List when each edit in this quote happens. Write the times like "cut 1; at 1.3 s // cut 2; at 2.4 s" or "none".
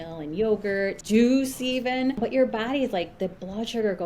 cut 1; at 1.0 s // cut 2; at 2.2 s